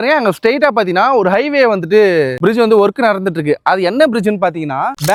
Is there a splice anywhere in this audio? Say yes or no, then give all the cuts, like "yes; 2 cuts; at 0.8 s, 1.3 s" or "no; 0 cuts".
no; 0 cuts